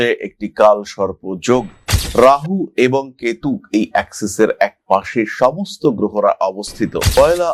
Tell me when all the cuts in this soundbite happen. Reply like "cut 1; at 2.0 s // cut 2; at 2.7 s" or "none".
none